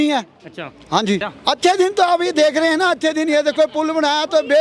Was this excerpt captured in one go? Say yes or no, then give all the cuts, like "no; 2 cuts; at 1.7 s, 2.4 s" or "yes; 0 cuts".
no; 1 cut; at 1.3 s